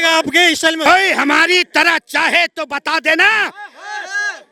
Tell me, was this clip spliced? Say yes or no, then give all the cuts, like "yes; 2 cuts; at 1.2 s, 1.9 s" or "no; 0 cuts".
no; 0 cuts